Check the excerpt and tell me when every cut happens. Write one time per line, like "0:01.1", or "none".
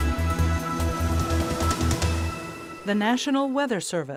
none